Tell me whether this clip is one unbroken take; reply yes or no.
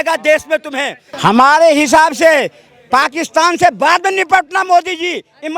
no